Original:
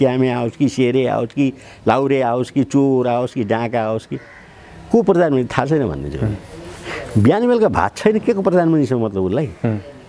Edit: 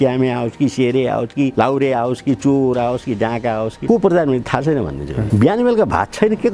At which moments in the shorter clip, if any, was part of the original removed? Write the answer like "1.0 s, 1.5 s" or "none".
1.5 s, 3.8 s, 5.2 s

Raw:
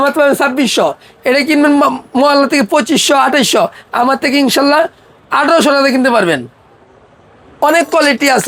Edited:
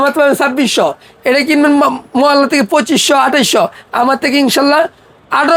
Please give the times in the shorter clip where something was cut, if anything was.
none

